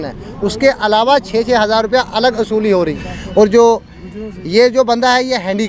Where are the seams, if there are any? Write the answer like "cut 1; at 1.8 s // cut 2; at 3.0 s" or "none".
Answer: cut 1; at 3.1 s